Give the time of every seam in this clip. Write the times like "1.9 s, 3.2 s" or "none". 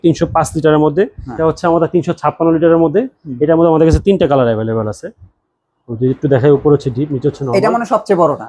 1.4 s

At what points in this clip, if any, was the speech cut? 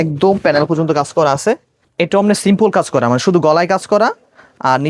1.8 s

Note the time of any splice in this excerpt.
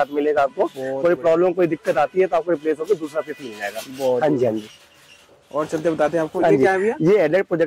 none

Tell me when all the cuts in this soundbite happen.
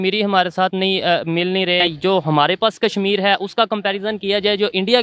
1.9 s

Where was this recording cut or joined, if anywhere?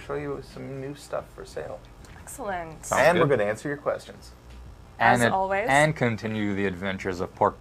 6.0 s

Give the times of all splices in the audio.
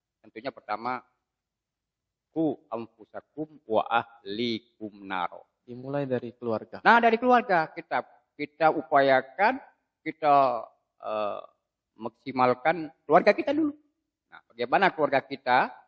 none

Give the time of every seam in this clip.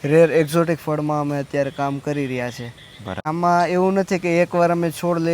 3.2 s

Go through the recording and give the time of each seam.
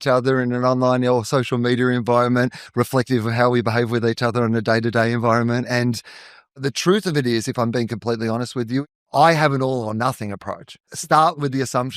6.6 s, 8.8 s, 10.9 s

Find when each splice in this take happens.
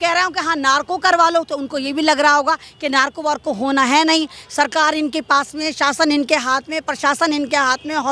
none

